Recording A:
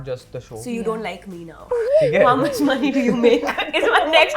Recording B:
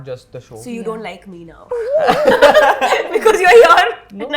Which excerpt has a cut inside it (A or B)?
A